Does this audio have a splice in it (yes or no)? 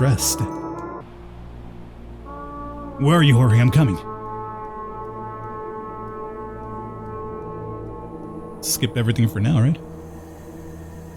no